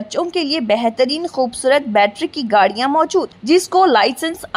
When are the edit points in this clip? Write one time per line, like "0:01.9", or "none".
none

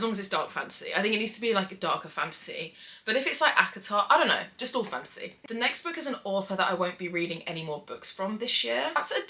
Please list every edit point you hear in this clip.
none

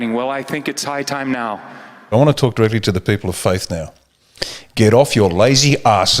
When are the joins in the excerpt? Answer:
0:02.1

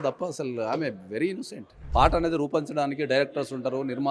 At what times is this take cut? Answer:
0:01.7

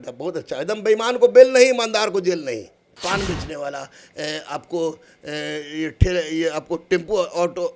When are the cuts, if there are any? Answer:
0:03.0

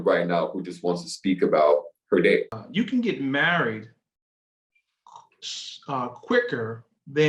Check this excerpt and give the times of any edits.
0:02.6

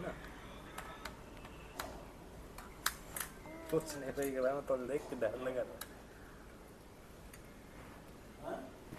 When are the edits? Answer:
none

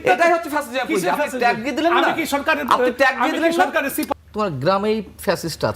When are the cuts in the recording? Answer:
0:04.1

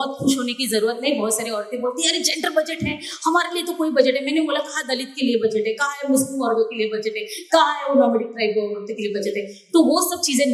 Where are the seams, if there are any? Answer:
none

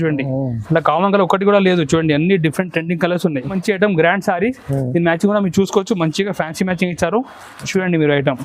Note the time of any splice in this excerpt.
0:03.6

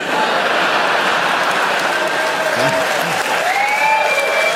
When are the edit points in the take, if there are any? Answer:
none

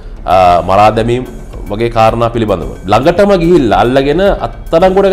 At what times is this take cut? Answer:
0:02.7

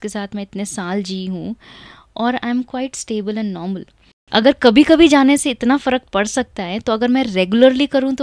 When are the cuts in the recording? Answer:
0:04.2

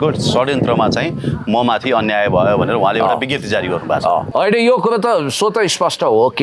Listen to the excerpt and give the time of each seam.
0:04.3

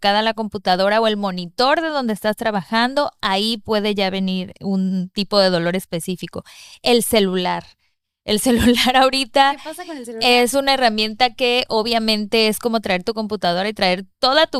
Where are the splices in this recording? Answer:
none

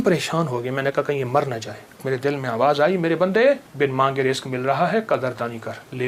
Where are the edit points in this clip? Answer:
0:02.0
0:03.7

